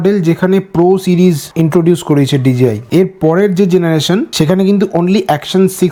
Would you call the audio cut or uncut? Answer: uncut